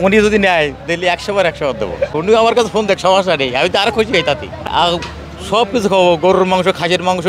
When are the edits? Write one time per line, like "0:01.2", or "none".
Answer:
0:02.2
0:04.6